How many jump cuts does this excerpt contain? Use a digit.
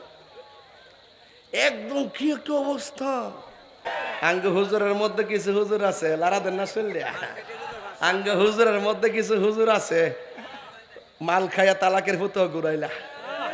1